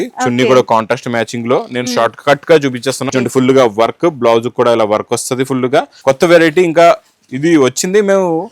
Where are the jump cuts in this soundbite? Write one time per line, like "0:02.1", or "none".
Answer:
0:03.0
0:05.9